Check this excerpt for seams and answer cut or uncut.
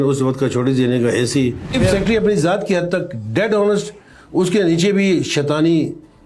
cut